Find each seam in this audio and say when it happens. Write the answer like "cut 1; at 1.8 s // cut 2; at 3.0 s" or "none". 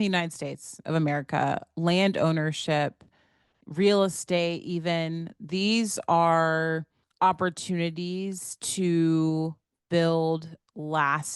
cut 1; at 7.0 s